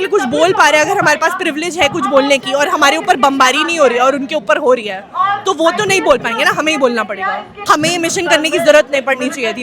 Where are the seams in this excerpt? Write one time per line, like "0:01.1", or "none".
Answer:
0:07.5